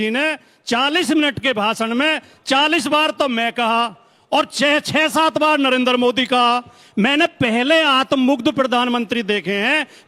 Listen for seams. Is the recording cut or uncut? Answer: uncut